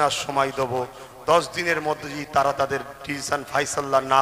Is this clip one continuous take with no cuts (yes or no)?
yes